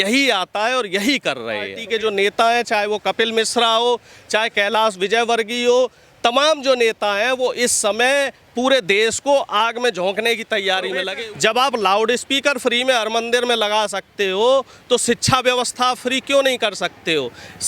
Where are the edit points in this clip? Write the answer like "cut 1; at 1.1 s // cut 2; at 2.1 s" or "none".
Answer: cut 1; at 1.8 s // cut 2; at 11.1 s